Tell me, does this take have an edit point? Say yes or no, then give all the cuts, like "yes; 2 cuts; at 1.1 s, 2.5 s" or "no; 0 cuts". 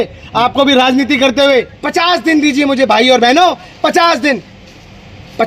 yes; 1 cut; at 1.8 s